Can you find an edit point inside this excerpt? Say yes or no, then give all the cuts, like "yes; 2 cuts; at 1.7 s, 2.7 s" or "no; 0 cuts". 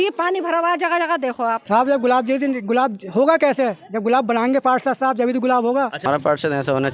yes; 2 cuts; at 1.6 s, 6.0 s